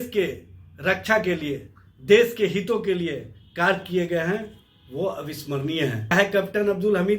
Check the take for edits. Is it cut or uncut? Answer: cut